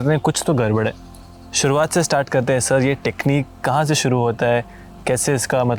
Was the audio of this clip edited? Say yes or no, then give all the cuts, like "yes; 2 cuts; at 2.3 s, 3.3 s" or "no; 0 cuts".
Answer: no; 0 cuts